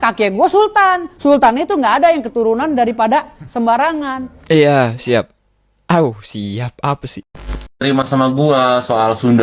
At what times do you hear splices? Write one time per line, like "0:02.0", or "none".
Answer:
0:07.2